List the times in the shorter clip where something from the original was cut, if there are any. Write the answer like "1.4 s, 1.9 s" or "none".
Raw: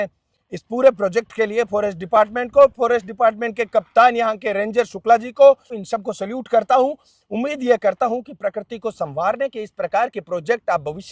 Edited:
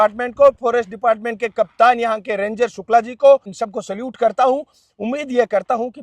3.6 s